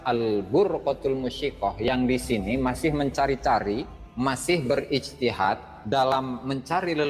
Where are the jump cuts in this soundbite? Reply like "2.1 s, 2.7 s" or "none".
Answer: 4.0 s